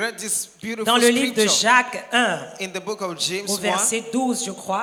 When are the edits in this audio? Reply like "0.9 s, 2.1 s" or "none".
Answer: none